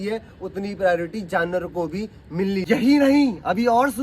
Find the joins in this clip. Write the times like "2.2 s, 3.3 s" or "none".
2.6 s